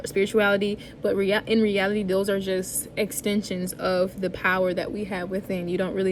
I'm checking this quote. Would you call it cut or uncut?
uncut